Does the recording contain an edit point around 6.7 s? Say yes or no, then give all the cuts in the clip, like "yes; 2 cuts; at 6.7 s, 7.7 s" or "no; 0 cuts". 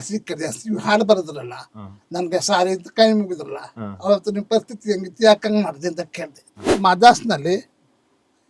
yes; 1 cut; at 6.7 s